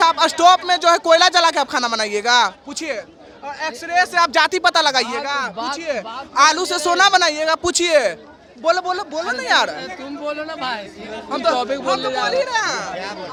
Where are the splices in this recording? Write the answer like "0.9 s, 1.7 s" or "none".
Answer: none